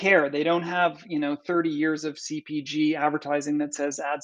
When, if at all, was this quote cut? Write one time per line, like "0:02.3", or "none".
none